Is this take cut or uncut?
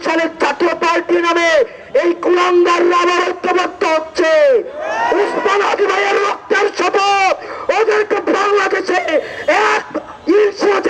uncut